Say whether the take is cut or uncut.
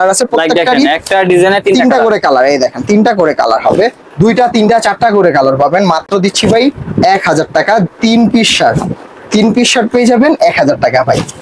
uncut